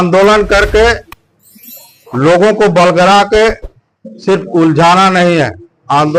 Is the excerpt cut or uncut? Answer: uncut